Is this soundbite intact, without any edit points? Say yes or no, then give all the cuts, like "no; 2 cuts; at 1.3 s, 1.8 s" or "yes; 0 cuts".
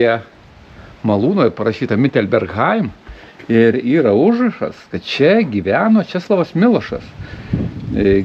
yes; 0 cuts